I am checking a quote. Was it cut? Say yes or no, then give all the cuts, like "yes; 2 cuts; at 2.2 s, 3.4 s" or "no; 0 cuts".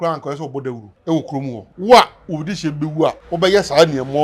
yes; 3 cuts; at 0.9 s, 1.7 s, 3.2 s